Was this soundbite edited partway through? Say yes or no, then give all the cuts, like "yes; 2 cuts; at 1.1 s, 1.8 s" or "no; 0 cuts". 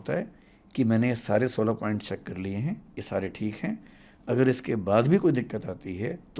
no; 0 cuts